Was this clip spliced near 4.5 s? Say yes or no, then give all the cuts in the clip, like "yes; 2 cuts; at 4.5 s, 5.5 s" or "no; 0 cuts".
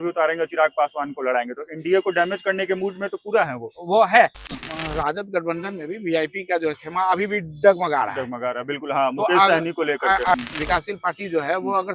yes; 2 cuts; at 4.5 s, 10.4 s